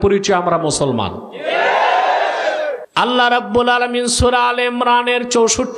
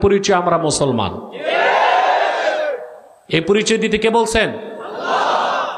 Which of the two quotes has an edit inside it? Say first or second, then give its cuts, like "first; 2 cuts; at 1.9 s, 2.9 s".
first; 1 cut; at 2.8 s